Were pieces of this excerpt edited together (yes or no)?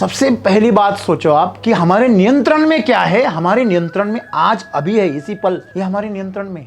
yes